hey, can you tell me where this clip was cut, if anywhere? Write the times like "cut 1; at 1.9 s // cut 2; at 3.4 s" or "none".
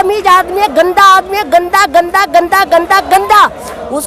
none

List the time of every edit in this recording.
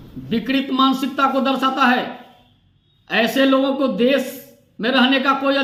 none

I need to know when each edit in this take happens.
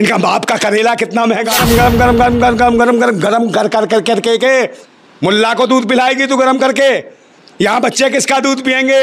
cut 1; at 1.6 s

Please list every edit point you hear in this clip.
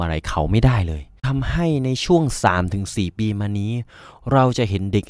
cut 1; at 1.2 s

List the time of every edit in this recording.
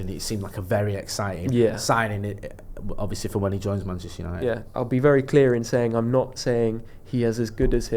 cut 1; at 4.6 s

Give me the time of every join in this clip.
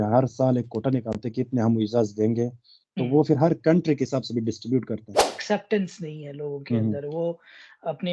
cut 1; at 5.4 s

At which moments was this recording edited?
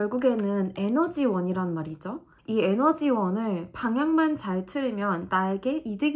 none

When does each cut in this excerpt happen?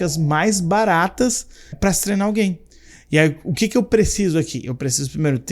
cut 1; at 1.7 s

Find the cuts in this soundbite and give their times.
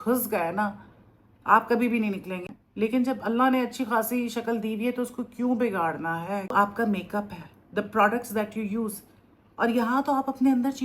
cut 1; at 2.5 s // cut 2; at 6.5 s

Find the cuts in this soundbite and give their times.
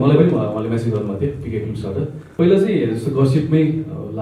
cut 1; at 2.3 s

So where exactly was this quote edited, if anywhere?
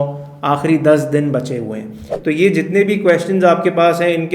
cut 1; at 2.1 s

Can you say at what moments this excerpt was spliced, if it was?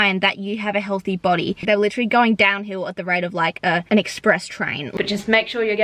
cut 1; at 1.6 s // cut 2; at 3.8 s // cut 3; at 4.8 s

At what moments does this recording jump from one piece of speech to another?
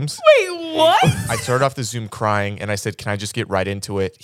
cut 1; at 1.3 s

